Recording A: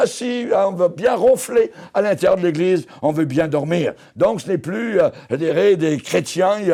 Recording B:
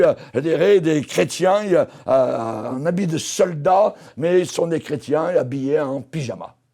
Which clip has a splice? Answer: B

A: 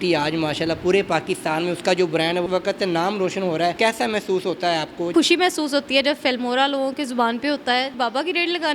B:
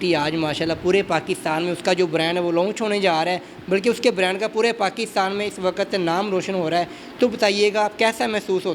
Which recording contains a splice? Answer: A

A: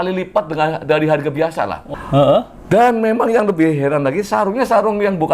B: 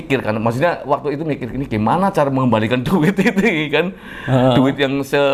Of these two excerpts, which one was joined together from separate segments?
A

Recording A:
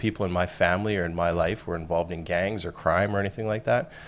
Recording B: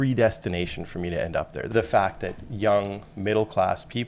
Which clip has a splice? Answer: B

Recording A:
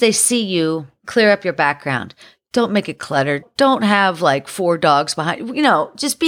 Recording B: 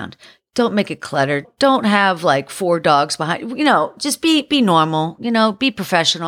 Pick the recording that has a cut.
A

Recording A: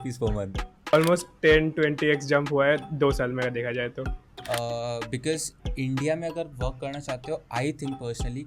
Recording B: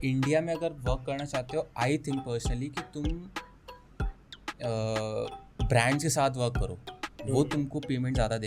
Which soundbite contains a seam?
A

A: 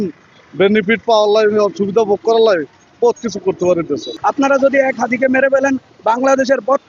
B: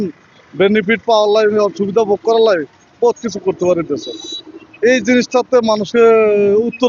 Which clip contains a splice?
A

